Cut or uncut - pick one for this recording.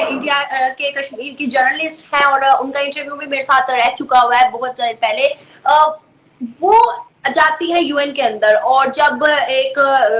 uncut